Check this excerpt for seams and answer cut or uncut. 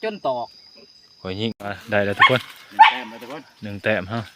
cut